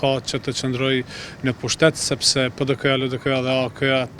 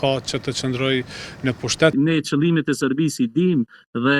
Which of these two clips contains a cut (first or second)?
second